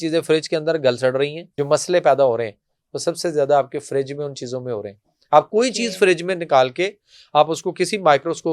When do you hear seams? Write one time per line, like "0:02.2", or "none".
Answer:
0:01.5